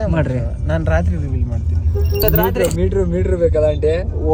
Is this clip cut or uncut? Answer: uncut